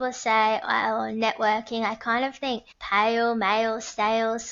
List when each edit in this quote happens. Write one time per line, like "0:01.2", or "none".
0:02.7

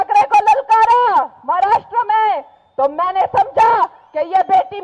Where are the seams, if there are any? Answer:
none

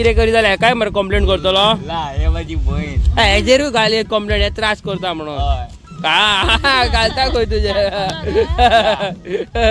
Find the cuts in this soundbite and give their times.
none

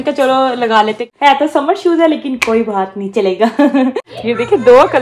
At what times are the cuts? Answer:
0:01.0
0:04.1

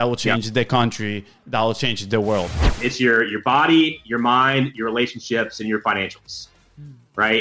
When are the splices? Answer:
0:02.7

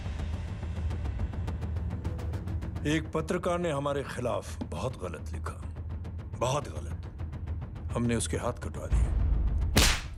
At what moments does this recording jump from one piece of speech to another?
none

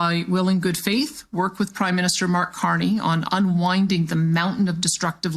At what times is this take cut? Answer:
none

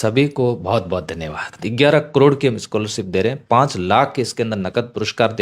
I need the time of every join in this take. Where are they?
0:01.7

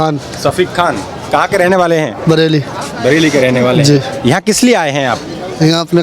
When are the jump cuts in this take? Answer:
none

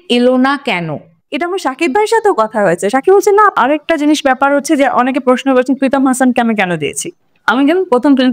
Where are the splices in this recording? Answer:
0:01.2
0:03.5

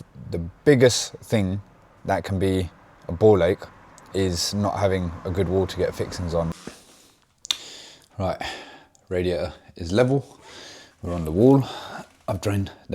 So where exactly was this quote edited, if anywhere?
0:06.6

